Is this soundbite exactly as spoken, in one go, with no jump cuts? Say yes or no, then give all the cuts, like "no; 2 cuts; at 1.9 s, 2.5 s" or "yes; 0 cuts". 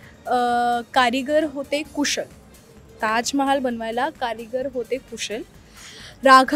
yes; 0 cuts